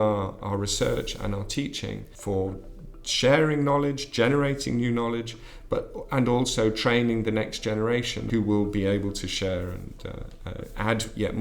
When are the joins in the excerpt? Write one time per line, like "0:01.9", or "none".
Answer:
0:02.1
0:08.2